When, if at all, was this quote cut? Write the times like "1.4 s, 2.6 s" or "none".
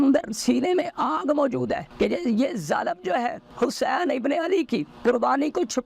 1.9 s, 3.4 s, 4.9 s

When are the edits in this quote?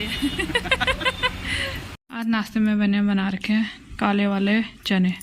1.9 s

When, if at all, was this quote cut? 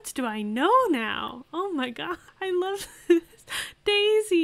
2.3 s

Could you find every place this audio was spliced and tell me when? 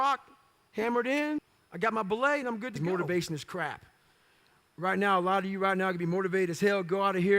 1.6 s, 2.8 s

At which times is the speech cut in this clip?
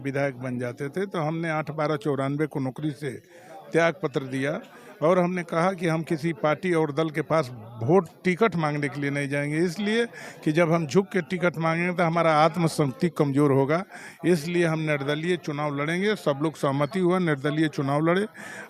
none

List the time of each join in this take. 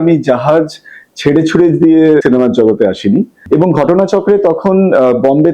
3.4 s

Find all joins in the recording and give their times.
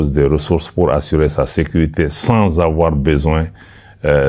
none

